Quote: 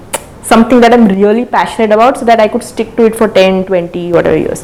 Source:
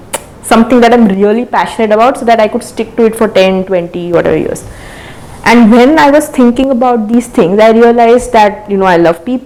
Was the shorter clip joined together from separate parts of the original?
no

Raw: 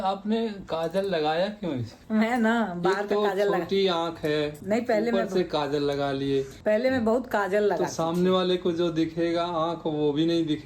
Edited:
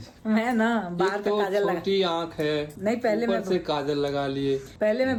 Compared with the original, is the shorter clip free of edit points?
yes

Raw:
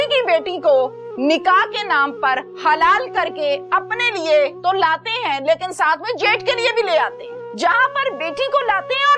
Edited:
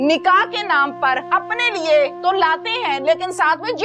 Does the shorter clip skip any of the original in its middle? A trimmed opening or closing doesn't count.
yes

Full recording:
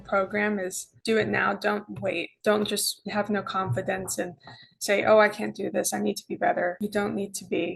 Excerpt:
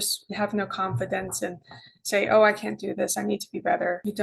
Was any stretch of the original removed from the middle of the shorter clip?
no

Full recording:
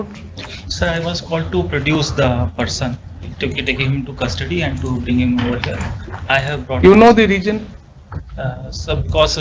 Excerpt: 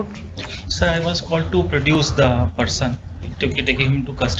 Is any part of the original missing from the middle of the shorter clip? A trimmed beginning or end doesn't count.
no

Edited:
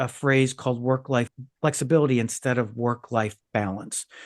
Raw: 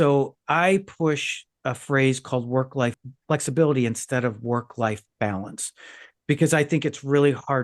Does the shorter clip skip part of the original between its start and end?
no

